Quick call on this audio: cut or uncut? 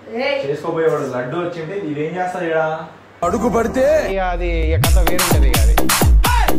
uncut